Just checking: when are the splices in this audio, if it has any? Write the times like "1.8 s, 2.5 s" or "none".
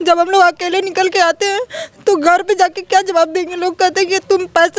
none